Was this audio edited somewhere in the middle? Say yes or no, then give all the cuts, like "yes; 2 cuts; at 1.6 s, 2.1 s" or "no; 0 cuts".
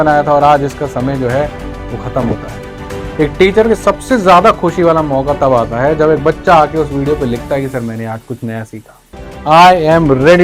yes; 2 cuts; at 2.8 s, 9.3 s